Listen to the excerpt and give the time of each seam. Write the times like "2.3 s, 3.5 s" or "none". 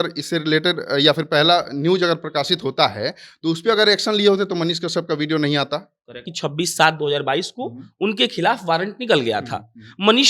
6.3 s

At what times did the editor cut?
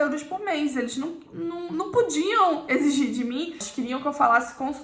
3.7 s

